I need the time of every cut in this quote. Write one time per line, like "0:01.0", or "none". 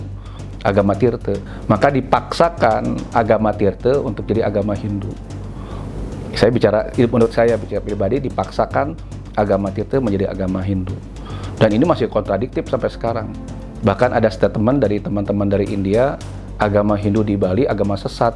0:01.5